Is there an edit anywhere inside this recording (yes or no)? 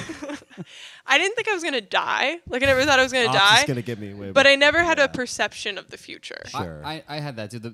no